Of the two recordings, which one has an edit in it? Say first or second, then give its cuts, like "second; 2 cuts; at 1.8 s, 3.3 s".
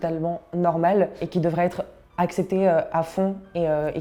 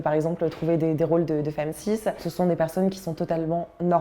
second; 1 cut; at 2.2 s